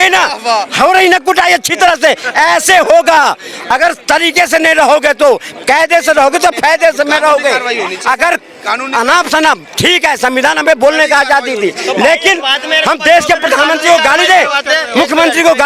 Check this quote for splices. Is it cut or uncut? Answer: uncut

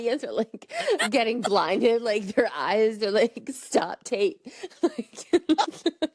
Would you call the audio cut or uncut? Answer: uncut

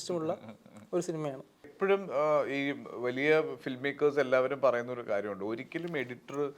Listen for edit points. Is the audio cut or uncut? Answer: cut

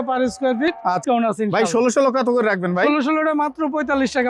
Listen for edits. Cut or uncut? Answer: cut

